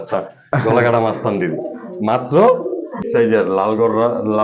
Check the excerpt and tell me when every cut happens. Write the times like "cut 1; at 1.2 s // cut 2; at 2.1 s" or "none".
cut 1; at 3.0 s